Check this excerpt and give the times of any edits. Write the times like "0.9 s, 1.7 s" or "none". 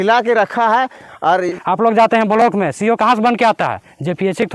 1.6 s